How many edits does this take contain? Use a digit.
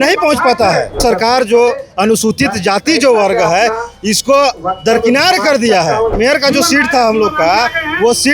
2